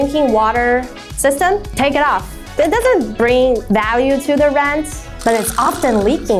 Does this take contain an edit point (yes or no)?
no